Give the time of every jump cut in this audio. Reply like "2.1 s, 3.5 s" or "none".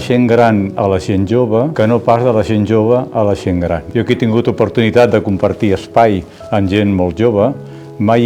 1.7 s, 3.8 s